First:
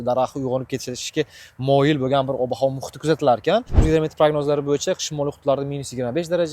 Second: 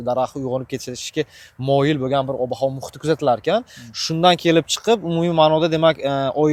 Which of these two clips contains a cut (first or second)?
first